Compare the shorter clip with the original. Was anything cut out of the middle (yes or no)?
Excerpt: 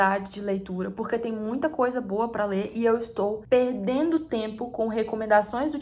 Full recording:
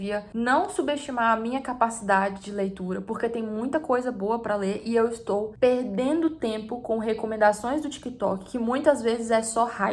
no